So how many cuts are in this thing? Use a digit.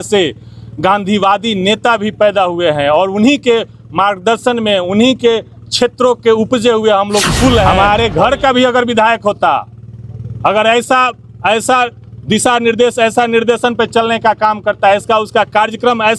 1